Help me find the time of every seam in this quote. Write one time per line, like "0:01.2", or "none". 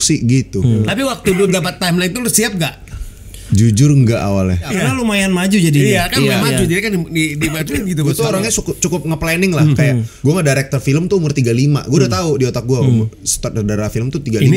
0:00.8
0:04.7
0:08.1
0:10.1